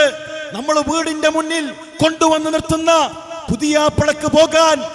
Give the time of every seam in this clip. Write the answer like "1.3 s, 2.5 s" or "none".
none